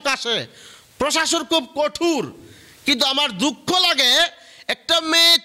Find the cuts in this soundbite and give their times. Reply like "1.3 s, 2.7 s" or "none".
none